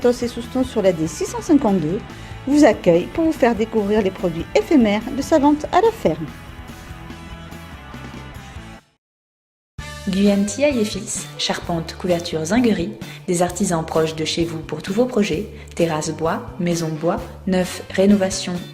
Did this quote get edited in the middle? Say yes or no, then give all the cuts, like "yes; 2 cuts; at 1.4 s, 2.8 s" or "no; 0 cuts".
no; 0 cuts